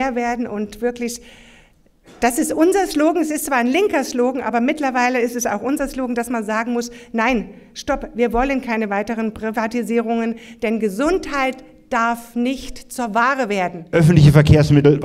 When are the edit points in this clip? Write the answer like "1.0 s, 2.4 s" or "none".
13.8 s